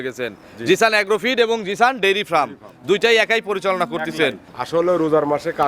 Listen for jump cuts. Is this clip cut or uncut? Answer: cut